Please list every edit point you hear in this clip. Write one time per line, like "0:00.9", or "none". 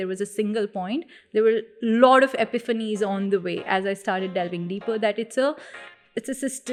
none